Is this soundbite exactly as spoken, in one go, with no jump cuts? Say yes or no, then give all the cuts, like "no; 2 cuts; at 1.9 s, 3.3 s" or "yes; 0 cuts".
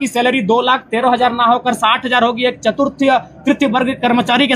yes; 0 cuts